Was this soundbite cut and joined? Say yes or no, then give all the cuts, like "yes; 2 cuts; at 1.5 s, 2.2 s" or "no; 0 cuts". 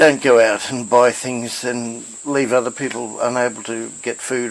no; 0 cuts